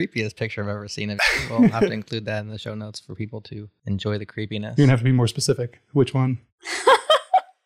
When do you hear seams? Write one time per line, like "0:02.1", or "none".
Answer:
0:03.6